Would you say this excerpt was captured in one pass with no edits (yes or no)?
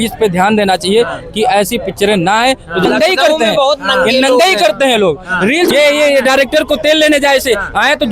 no